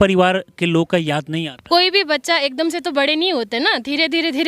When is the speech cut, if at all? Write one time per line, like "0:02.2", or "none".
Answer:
0:01.5